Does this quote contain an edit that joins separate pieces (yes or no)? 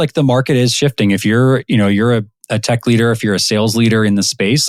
no